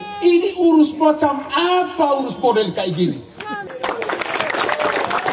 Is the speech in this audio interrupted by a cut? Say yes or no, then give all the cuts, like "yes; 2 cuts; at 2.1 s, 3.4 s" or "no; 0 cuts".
yes; 1 cut; at 3.7 s